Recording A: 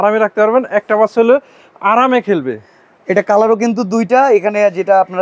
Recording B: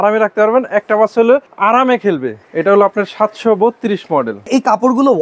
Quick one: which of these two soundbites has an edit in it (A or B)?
B